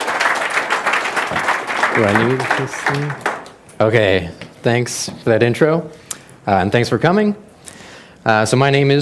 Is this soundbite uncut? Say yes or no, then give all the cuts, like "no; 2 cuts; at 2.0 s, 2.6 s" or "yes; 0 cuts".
yes; 0 cuts